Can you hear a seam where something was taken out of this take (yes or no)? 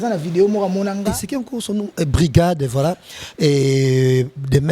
yes